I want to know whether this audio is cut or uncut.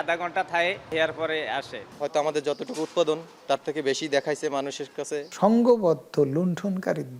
cut